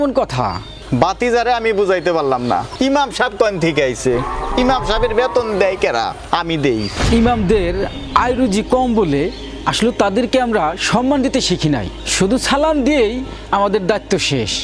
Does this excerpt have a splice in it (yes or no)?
yes